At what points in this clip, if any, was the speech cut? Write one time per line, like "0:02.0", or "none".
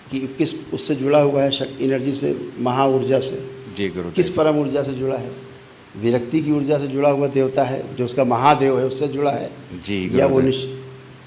none